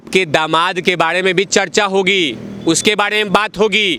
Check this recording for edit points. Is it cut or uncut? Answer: uncut